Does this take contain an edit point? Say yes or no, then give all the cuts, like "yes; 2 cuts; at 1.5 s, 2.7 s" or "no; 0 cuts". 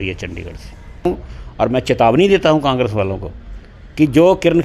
yes; 1 cut; at 1.0 s